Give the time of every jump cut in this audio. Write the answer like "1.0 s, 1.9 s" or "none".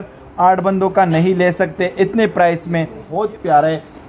3.1 s